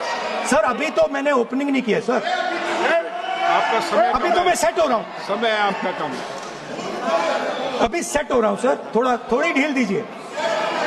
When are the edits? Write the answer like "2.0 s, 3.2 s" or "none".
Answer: none